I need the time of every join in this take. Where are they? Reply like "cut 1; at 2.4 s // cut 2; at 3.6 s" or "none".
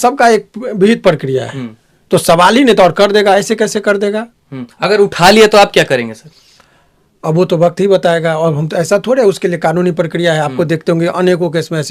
none